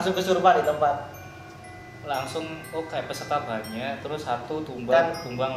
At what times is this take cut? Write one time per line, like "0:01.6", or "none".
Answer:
none